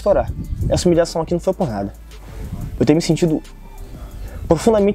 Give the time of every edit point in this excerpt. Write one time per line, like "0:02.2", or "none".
none